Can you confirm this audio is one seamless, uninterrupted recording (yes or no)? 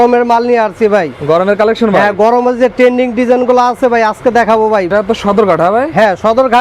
no